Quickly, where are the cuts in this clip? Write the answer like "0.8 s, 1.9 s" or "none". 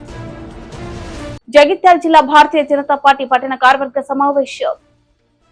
none